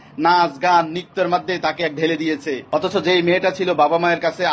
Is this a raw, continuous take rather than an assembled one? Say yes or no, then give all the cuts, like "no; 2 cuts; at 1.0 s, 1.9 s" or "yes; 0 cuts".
no; 1 cut; at 2.7 s